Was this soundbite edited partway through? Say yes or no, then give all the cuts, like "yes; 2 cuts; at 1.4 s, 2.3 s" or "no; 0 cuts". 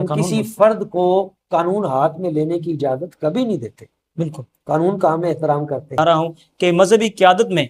yes; 1 cut; at 6.0 s